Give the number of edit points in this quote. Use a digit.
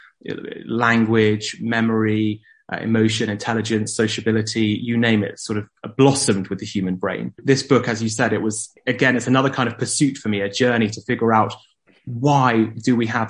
2